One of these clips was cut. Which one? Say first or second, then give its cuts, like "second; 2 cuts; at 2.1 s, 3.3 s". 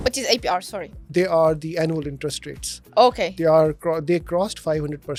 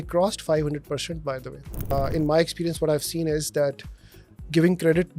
second; 1 cut; at 1.9 s